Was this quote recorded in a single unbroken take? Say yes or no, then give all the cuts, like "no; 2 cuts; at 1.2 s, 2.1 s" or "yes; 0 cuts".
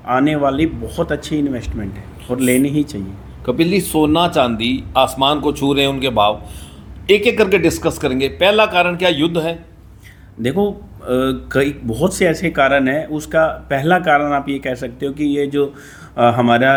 yes; 0 cuts